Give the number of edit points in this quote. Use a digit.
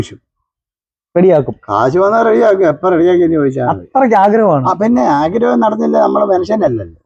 0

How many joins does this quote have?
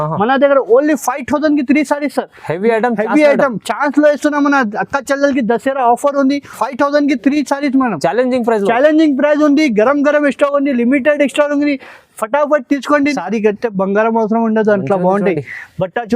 2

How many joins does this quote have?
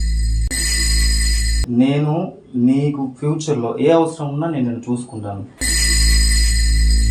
2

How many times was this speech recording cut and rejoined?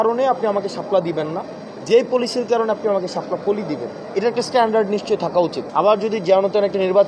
1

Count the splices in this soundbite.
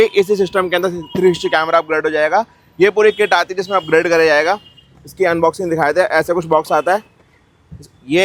0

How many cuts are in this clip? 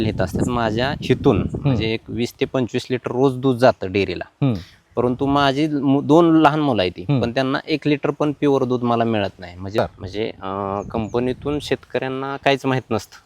1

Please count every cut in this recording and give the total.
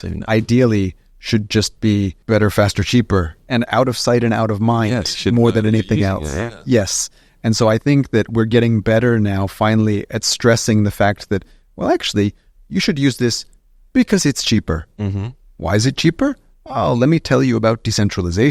2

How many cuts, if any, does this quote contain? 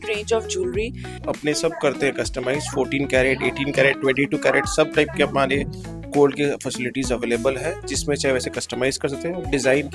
1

